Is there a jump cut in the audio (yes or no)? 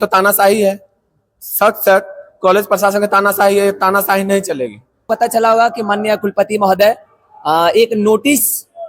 yes